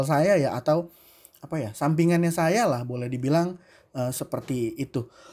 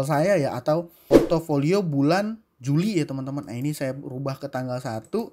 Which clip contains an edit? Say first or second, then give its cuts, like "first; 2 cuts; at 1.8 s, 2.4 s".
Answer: second; 1 cut; at 1.0 s